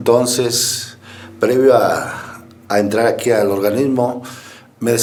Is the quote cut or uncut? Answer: uncut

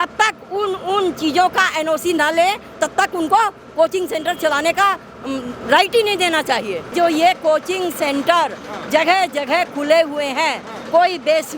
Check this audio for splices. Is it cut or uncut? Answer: cut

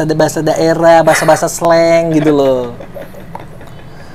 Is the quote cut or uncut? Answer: uncut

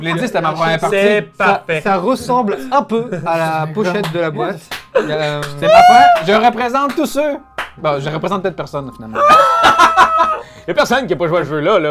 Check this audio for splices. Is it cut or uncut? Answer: uncut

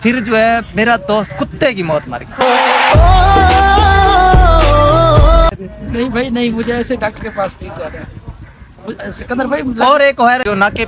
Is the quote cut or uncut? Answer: uncut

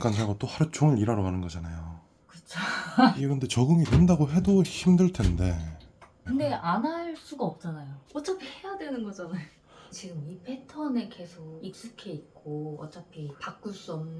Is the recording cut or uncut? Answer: uncut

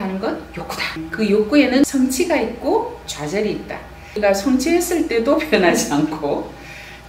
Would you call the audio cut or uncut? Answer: cut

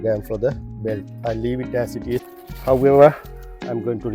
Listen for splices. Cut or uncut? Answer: cut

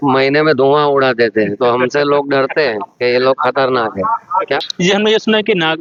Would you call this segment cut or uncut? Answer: uncut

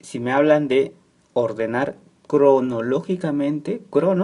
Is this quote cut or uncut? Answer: uncut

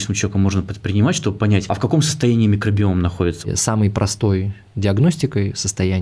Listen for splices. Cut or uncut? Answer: cut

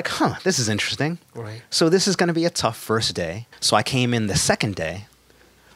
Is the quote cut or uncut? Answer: cut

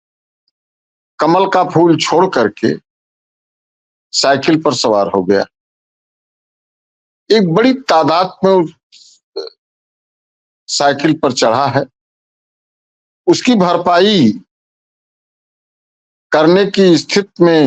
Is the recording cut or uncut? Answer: uncut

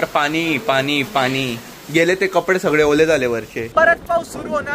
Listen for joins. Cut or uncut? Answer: cut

